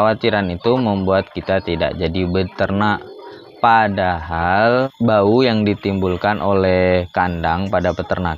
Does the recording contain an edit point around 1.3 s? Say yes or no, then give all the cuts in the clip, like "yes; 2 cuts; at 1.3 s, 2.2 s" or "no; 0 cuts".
no; 1 cut; at 4.9 s